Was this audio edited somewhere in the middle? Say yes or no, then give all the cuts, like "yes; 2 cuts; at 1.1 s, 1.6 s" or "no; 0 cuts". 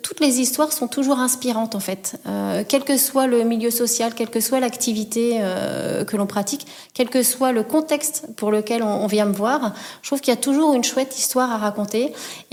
no; 0 cuts